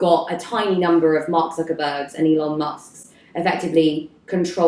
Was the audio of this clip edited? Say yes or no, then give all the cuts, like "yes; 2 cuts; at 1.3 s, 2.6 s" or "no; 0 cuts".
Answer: no; 0 cuts